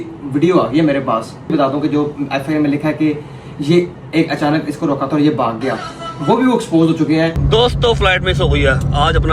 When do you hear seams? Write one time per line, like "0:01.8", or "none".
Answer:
0:01.5
0:07.4